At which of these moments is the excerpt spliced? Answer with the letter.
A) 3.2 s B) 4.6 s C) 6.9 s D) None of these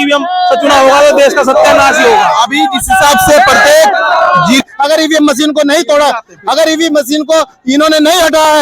B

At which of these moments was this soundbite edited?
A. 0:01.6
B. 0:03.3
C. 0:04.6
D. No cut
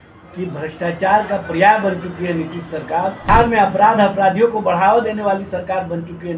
B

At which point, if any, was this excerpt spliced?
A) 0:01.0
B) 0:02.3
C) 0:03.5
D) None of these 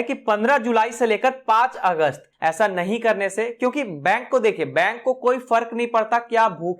B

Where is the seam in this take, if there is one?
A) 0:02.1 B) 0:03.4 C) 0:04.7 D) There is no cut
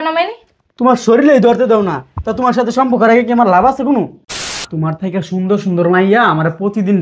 C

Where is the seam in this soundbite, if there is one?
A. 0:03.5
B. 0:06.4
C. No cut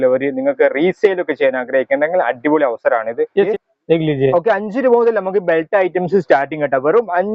A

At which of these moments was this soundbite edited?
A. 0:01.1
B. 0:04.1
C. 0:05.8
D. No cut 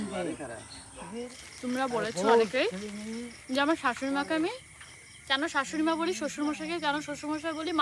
A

